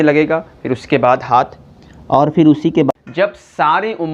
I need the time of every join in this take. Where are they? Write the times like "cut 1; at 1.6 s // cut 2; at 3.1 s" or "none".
cut 1; at 2.9 s